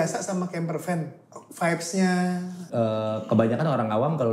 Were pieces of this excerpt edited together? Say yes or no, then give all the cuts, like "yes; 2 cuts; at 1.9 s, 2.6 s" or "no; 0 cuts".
yes; 1 cut; at 2.6 s